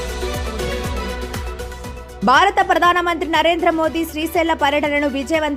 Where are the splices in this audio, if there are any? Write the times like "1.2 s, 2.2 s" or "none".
2.1 s